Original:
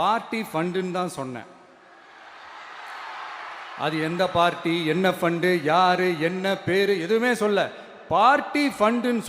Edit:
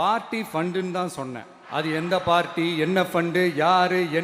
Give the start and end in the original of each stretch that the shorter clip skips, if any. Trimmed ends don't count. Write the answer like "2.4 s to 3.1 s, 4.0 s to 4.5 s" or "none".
1.5 s to 3.6 s

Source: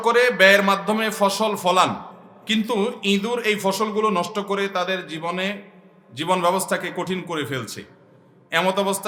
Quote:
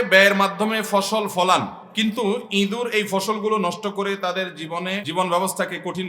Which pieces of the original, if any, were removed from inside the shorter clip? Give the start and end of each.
2.1 s to 2.3 s, 5.6 s to 6.2 s

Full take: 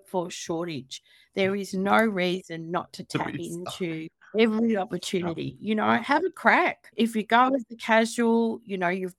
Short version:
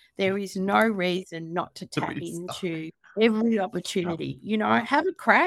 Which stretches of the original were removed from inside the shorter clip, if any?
none

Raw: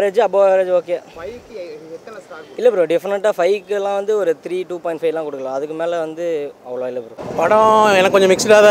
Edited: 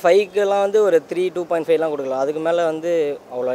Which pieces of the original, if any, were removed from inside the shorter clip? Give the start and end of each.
none

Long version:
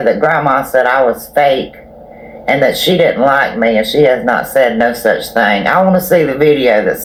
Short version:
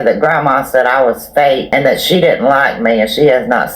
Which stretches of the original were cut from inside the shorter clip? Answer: 1.6 s to 2.4 s

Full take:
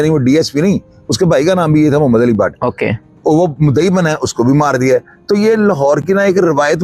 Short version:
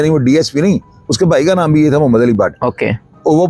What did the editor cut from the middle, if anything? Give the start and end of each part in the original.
none

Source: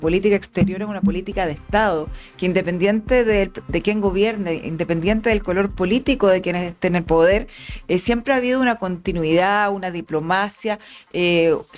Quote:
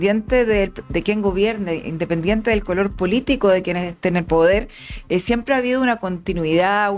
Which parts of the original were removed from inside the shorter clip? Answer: none

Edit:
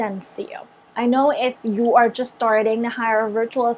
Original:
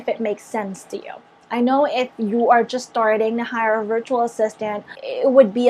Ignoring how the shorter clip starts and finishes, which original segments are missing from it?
none

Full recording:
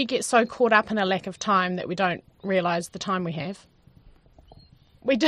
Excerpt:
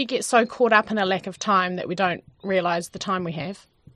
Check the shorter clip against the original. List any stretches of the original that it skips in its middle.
none

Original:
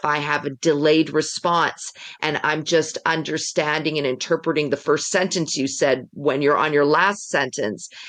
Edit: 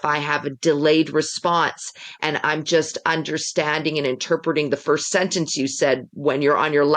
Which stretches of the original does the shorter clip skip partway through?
none

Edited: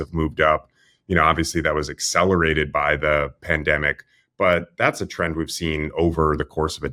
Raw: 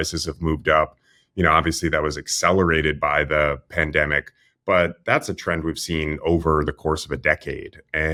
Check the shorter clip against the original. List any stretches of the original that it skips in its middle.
none

